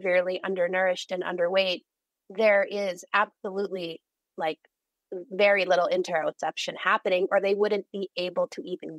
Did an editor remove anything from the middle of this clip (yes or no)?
no